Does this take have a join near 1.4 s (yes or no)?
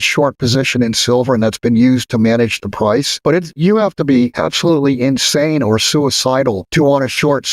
no